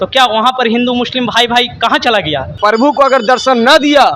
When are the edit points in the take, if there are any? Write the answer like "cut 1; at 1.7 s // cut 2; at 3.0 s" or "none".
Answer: cut 1; at 2.5 s